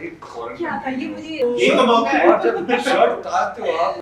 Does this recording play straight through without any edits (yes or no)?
no